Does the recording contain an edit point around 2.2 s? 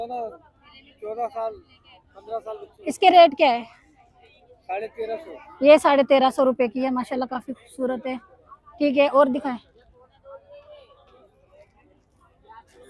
no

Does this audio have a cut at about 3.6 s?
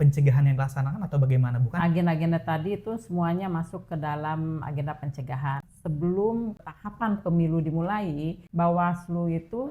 no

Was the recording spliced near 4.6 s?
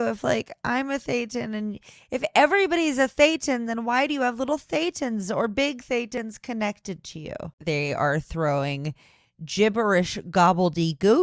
no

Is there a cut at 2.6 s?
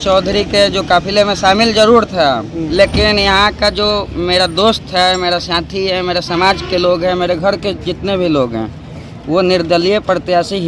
yes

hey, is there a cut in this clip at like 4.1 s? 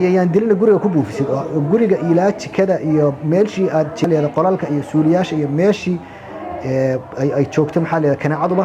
yes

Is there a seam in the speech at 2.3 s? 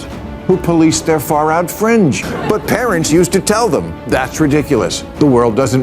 yes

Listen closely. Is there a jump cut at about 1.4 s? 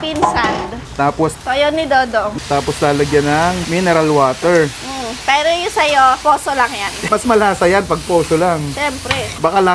yes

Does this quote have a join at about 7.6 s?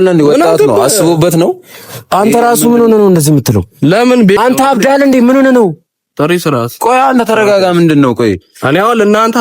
no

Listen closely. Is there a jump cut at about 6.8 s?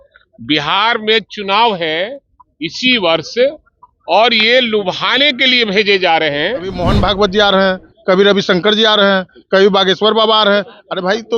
yes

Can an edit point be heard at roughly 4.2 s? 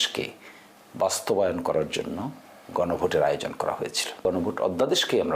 yes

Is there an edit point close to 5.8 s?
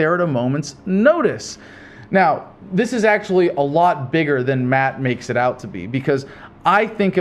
yes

